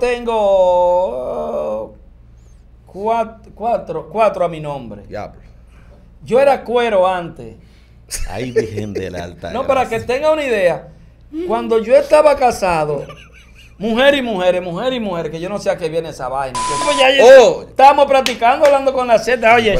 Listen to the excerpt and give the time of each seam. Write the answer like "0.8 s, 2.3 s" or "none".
16.9 s

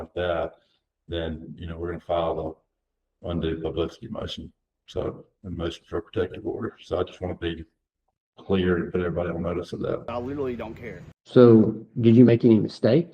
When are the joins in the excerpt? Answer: 10.6 s

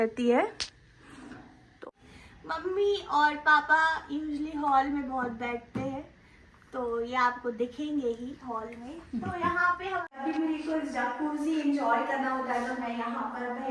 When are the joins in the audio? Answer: 1.8 s, 10.2 s

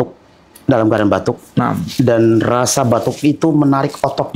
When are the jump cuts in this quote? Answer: none

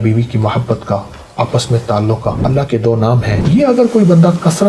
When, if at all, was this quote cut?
2.4 s, 3.4 s

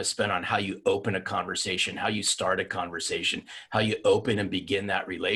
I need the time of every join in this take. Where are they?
none

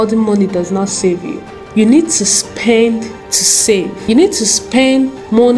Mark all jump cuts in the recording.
none

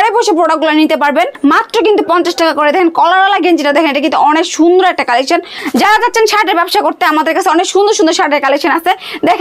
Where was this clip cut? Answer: 1.3 s, 5.6 s

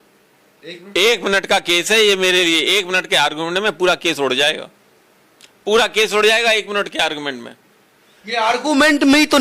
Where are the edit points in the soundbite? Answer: none

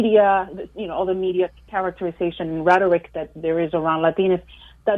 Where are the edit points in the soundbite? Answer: 1.6 s

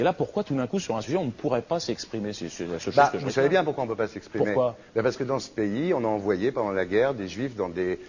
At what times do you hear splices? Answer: 4.5 s

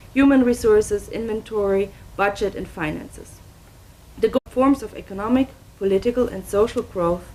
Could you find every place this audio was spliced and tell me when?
none

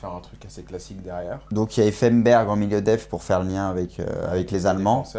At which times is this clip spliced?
none

